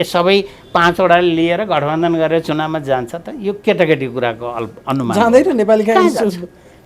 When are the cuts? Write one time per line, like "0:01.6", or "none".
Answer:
none